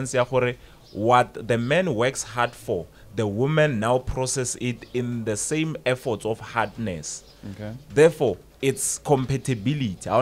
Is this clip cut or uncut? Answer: uncut